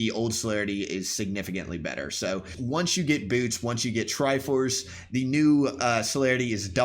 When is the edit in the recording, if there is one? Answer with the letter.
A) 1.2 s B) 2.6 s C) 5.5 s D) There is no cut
B